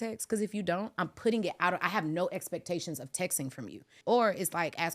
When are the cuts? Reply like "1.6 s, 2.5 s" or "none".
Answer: 3.9 s